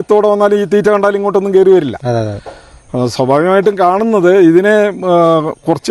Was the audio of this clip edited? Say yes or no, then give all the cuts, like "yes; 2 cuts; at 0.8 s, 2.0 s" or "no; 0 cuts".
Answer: no; 0 cuts